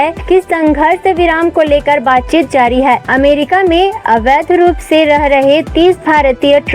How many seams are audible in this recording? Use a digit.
1